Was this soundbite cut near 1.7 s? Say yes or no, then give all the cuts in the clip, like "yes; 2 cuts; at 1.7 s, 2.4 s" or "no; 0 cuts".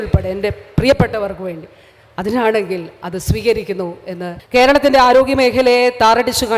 no; 1 cut; at 4.3 s